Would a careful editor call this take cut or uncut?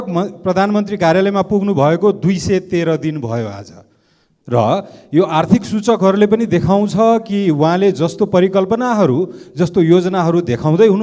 uncut